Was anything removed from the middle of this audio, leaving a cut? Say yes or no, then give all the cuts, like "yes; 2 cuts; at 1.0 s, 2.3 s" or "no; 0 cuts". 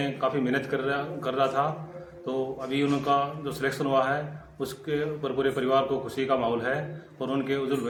no; 0 cuts